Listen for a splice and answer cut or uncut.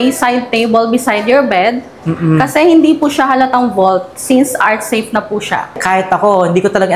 cut